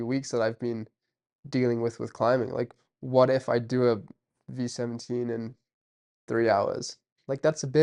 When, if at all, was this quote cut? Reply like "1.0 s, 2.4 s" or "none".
none